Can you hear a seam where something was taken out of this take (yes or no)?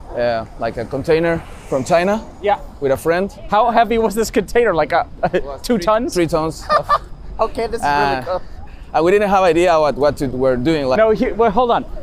no